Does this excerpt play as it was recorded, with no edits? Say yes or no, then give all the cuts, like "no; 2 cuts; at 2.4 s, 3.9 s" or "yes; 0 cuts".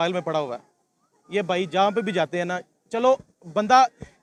yes; 0 cuts